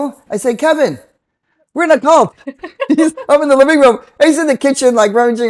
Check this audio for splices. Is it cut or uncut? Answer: uncut